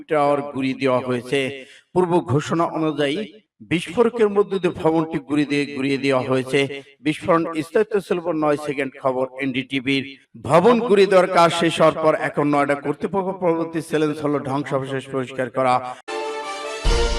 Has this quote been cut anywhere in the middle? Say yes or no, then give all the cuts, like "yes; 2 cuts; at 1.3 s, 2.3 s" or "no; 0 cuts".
yes; 1 cut; at 16.0 s